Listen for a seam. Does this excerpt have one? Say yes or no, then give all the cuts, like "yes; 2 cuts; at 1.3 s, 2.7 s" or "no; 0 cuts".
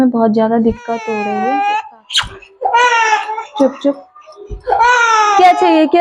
yes; 1 cut; at 1.2 s